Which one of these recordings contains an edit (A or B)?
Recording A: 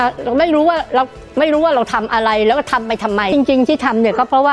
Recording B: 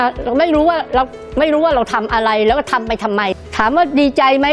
B